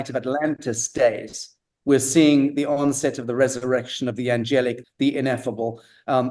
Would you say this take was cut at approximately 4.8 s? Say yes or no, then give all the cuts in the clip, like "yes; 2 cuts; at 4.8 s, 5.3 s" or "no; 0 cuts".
yes; 1 cut; at 4.8 s